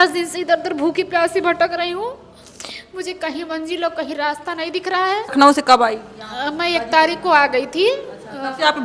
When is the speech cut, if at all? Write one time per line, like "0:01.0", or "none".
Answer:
0:05.3